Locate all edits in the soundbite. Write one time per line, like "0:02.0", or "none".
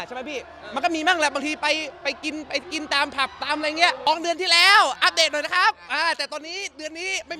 0:04.1